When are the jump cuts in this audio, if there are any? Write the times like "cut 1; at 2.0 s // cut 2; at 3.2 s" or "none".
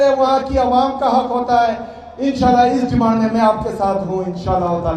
none